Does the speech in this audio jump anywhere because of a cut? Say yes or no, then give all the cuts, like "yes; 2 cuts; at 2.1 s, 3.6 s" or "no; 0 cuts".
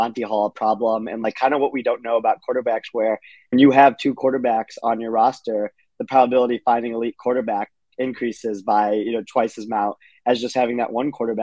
yes; 1 cut; at 3.3 s